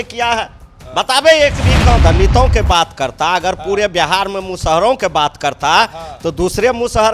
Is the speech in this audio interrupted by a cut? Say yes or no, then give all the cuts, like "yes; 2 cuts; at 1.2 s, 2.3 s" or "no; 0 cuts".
yes; 1 cut; at 2.0 s